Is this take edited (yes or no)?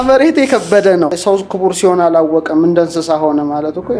yes